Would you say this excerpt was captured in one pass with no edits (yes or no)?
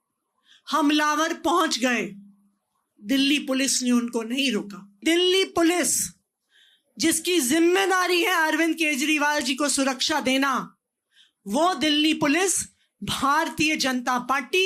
no